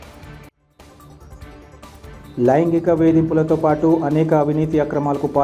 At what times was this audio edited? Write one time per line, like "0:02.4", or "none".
0:02.1

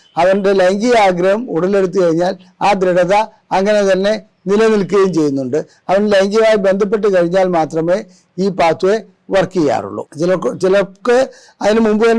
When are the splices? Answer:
none

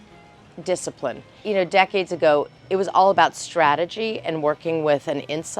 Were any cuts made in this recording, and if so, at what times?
0:01.3

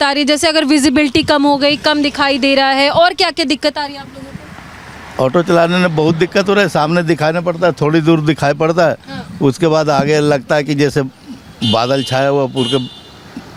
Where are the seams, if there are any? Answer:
none

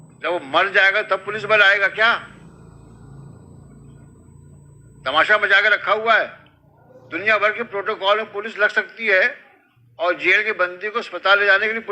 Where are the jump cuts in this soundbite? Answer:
none

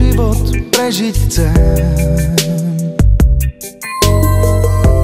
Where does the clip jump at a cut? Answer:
0:03.9

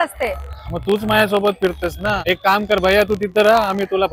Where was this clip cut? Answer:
0:02.2

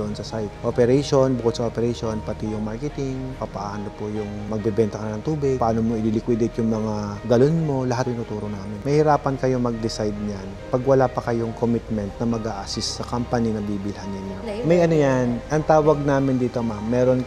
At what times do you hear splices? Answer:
0:08.7
0:14.4

